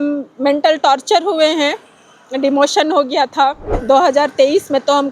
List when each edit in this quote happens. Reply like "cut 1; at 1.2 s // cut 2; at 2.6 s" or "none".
cut 1; at 3.7 s